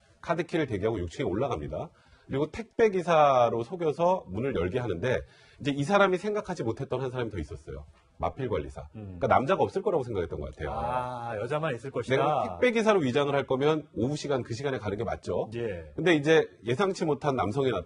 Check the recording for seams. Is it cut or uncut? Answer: cut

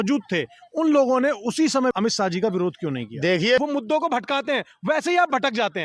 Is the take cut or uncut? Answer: cut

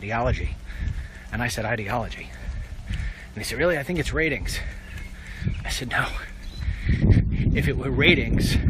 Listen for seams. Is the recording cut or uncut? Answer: uncut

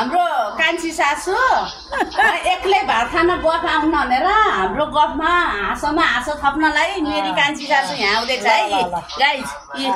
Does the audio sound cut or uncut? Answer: uncut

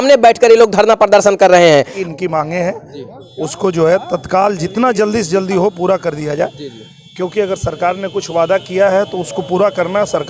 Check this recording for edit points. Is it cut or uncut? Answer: cut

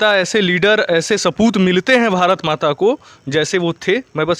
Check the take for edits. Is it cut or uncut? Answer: uncut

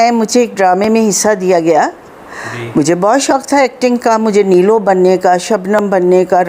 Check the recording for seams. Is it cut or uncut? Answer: uncut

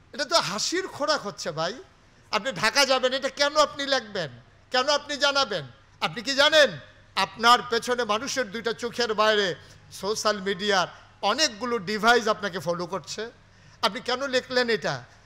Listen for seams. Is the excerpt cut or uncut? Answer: uncut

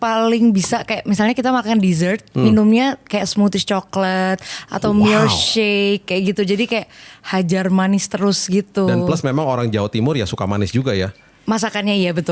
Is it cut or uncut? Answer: uncut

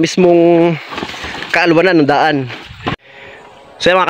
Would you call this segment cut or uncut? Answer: cut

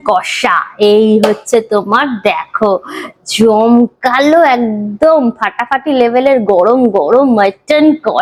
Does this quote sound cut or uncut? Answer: uncut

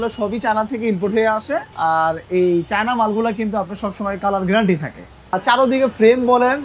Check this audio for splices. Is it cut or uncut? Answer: cut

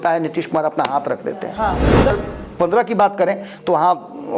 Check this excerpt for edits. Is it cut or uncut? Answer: cut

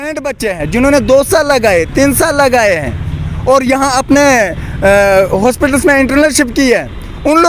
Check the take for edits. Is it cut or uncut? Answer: uncut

